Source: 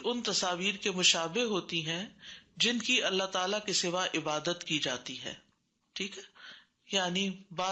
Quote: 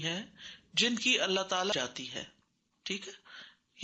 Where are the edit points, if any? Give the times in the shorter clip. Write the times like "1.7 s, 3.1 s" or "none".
1.7 s